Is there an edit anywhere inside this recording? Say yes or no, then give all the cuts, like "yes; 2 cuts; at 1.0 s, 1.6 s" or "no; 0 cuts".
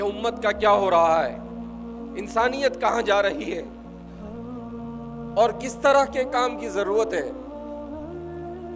yes; 3 cuts; at 3.6 s, 5.0 s, 7.3 s